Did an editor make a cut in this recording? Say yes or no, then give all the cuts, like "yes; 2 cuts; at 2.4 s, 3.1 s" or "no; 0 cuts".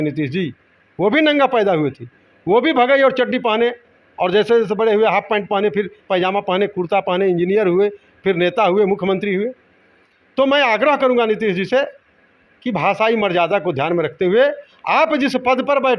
no; 0 cuts